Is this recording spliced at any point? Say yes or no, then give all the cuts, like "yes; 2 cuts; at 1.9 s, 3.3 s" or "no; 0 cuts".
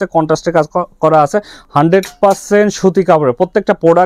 no; 0 cuts